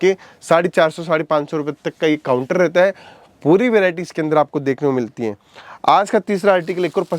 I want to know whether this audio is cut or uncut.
uncut